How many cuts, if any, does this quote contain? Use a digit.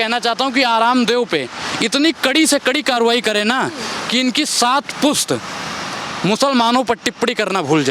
0